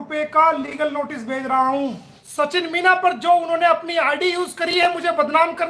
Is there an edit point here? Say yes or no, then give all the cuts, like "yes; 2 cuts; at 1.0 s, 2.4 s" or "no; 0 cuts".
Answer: yes; 1 cut; at 2.1 s